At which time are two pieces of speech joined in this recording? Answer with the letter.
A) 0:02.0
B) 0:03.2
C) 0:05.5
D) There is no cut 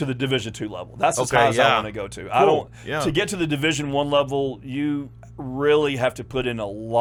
D